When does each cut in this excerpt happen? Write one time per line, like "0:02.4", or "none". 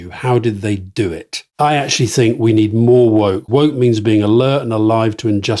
0:01.4
0:03.4